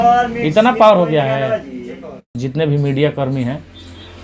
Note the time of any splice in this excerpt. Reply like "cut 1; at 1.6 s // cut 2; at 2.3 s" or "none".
cut 1; at 2.3 s